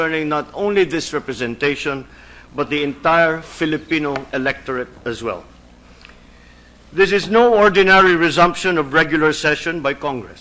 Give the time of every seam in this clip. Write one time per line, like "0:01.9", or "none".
0:03.5